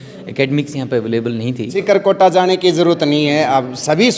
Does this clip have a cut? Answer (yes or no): yes